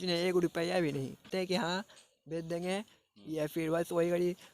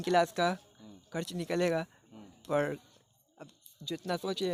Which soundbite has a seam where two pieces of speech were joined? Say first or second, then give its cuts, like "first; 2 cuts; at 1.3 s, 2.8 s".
first; 1 cut; at 1.3 s